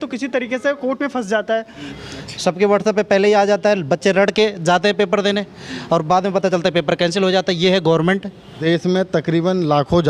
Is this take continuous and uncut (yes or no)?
no